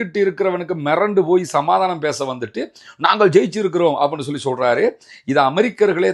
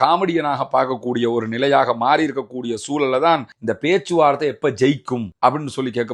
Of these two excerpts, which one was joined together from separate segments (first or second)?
second